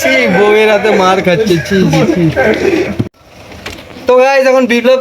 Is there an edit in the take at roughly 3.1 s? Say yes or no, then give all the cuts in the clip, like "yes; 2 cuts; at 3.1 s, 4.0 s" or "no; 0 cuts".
yes; 1 cut; at 3.1 s